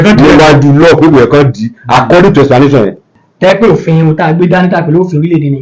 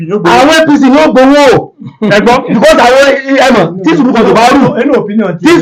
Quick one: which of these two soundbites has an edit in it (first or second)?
first